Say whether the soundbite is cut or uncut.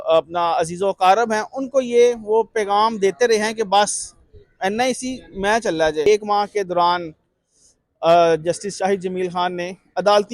cut